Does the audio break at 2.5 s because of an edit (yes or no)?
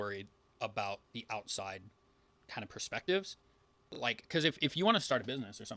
no